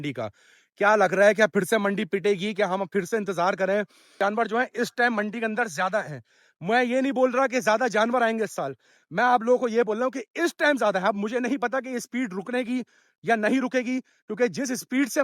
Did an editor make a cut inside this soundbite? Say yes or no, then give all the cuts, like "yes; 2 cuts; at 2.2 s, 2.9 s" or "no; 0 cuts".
yes; 1 cut; at 4.2 s